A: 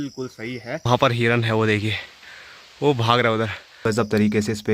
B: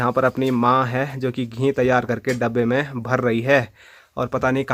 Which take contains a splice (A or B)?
A